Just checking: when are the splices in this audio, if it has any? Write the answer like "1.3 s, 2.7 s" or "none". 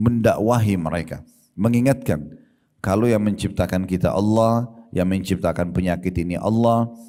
none